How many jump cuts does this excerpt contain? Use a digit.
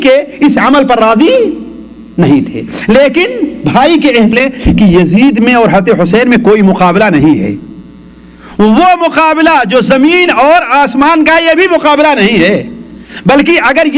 1